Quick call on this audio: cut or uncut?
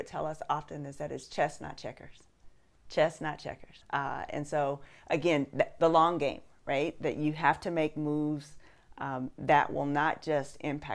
cut